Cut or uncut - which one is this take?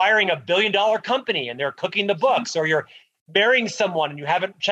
uncut